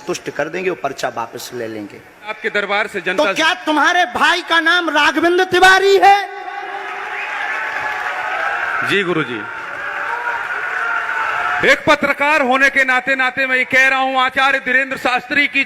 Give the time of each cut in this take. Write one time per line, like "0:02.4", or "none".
0:02.4